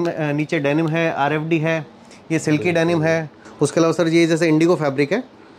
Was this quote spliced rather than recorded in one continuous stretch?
yes; 1 cut; at 3.4 s

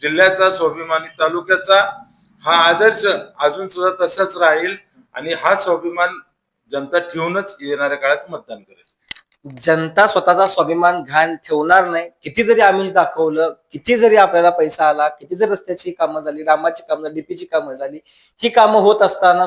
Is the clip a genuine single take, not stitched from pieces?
yes; 0 cuts

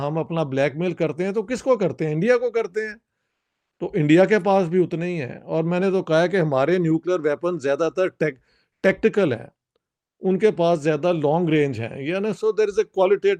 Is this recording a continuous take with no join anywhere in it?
yes; 0 cuts

